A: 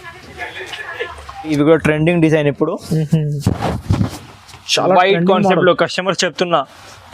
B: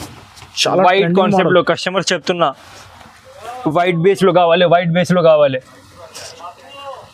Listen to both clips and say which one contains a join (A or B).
A